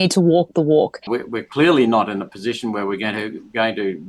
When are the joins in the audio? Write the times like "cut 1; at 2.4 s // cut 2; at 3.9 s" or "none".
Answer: cut 1; at 1.1 s

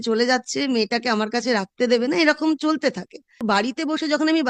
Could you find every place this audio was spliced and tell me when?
cut 1; at 3.4 s

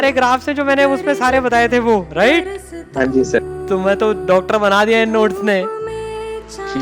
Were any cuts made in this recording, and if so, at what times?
cut 1; at 3.5 s

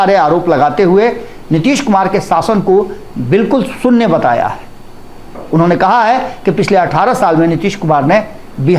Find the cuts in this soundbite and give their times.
none

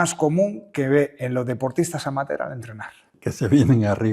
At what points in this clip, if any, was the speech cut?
cut 1; at 3.1 s

